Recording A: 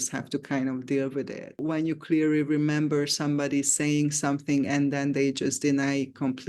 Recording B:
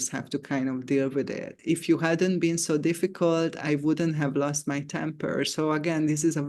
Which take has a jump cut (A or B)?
A